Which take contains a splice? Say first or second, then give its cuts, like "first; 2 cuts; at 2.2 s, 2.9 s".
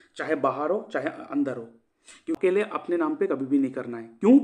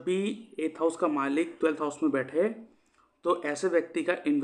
first; 1 cut; at 2.4 s